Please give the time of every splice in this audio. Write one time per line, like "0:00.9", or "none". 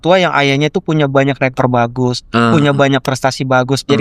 none

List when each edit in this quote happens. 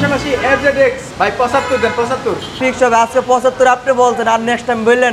0:01.1
0:02.5

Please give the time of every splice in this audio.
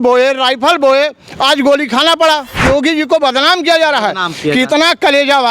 0:02.5

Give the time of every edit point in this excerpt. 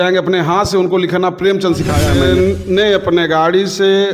0:02.3

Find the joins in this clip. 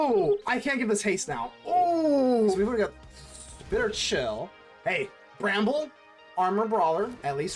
0:02.6
0:05.2

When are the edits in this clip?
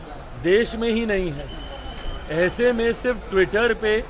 none

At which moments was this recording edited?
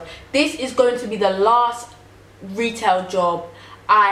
none

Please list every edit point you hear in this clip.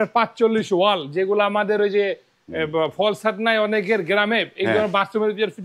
none

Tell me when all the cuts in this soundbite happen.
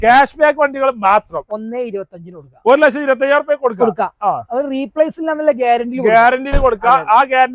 0:01.4

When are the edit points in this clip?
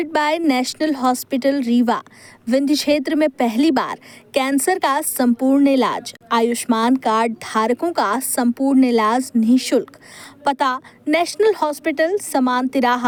none

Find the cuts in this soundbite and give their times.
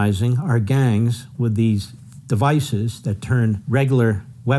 0:01.2
0:03.6

